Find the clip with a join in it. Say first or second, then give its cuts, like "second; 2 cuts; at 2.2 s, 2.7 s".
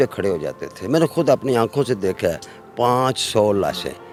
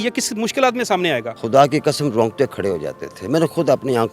second; 1 cut; at 1.3 s